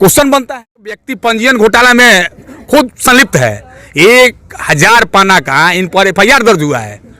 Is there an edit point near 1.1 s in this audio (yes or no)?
yes